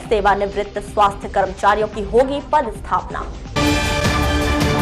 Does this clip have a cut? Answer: no; 0 cuts

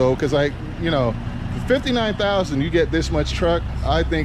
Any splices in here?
no; 0 cuts

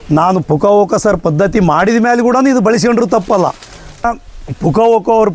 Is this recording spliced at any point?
yes; 1 cut; at 4.0 s

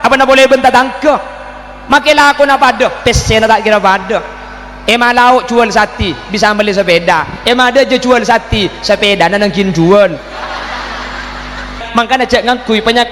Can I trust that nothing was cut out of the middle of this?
no; 1 cut; at 11.8 s

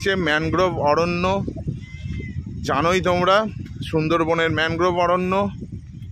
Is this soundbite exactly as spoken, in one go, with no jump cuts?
yes; 0 cuts

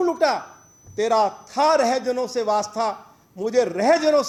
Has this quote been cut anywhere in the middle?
no; 0 cuts

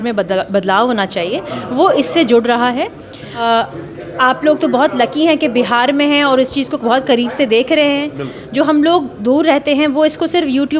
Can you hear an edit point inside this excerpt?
yes; 1 cut; at 3.4 s

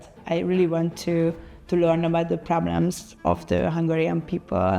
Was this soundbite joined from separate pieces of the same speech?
yes; 1 cut; at 3.1 s

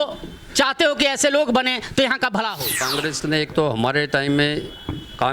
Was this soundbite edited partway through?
yes; 1 cut; at 2.8 s

